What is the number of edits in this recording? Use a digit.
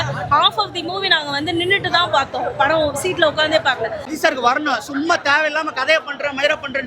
1